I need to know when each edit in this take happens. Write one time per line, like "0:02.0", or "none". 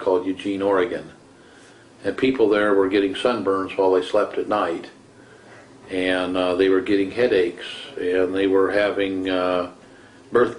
0:01.1

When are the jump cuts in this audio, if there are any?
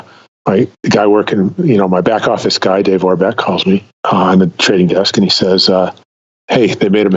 0:03.9

